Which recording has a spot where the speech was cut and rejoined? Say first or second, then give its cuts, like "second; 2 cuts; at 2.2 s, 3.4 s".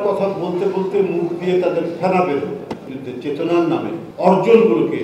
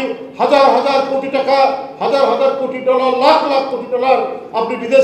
first; 2 cuts; at 2.9 s, 4.0 s